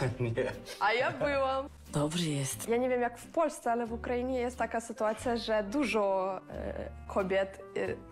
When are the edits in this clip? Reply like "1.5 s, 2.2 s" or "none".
none

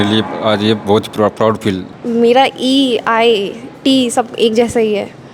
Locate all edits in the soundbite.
1.9 s

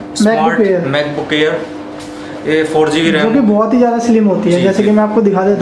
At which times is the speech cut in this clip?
none

